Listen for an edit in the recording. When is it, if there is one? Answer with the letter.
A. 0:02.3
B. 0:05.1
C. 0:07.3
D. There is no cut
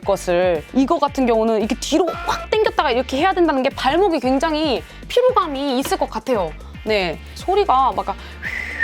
C